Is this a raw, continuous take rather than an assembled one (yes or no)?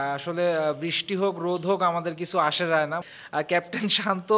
no